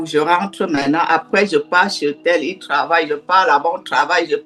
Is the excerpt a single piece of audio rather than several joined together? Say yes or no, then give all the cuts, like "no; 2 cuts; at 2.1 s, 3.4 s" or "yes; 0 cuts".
yes; 0 cuts